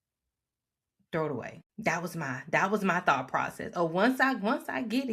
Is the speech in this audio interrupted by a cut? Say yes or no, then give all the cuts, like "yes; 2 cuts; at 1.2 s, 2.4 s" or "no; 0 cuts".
yes; 1 cut; at 1.6 s